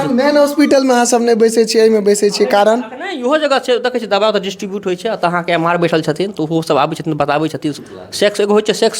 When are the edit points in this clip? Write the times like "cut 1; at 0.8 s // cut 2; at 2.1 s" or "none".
cut 1; at 7.7 s